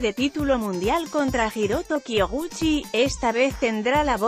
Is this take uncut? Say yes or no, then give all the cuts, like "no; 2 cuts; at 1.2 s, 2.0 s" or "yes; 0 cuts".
yes; 0 cuts